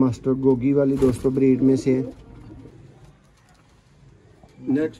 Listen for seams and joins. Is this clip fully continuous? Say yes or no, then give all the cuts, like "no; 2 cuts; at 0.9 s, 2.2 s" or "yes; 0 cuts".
no; 1 cut; at 2.6 s